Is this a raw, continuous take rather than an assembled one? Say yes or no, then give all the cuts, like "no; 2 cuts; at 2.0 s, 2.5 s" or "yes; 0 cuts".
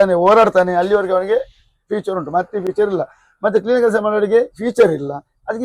yes; 0 cuts